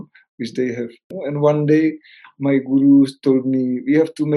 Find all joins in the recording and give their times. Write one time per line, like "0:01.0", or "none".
0:01.0